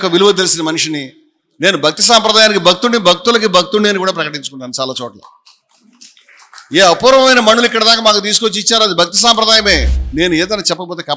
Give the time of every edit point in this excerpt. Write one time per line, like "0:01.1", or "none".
0:09.9